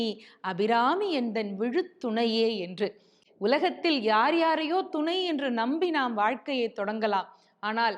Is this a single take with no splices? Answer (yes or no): yes